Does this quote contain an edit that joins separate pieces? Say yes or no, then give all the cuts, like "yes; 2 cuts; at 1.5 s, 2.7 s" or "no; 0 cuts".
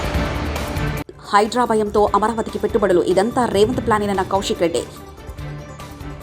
no; 0 cuts